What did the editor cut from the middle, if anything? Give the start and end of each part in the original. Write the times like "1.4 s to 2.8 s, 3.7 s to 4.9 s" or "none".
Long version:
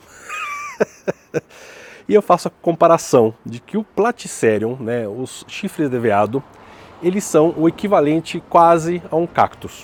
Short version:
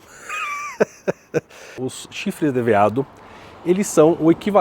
1.9 s to 5.2 s